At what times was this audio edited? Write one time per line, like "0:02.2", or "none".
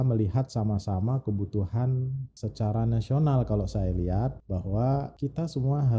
0:02.2
0:04.4
0:05.1